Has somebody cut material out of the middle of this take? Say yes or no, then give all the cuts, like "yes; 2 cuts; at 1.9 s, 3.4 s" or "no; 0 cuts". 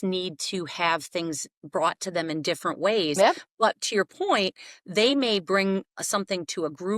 no; 0 cuts